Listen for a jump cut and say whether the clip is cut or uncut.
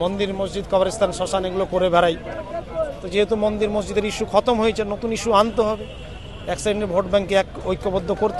uncut